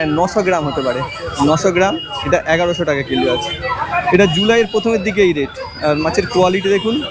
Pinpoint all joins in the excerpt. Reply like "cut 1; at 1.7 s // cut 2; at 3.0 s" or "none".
none